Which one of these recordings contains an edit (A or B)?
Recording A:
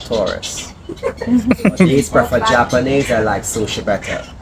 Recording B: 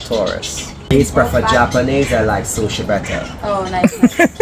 B